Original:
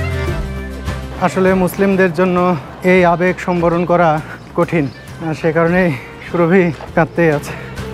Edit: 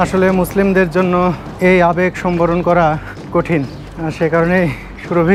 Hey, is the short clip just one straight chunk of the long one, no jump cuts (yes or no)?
yes